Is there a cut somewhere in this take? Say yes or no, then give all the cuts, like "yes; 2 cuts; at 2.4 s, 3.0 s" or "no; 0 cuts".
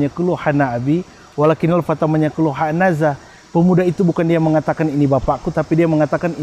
no; 0 cuts